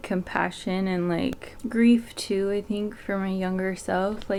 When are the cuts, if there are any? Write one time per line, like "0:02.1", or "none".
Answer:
none